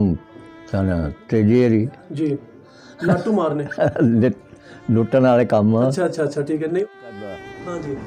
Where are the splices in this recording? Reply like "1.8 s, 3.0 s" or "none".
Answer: 6.9 s